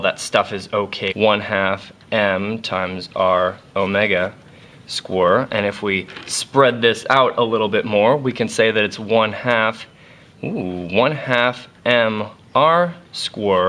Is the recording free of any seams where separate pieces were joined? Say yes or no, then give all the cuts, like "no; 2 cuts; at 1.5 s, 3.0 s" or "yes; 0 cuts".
yes; 0 cuts